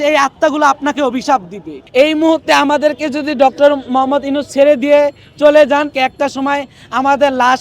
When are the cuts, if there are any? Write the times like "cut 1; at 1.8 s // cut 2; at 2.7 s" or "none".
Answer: cut 1; at 1.7 s // cut 2; at 5.9 s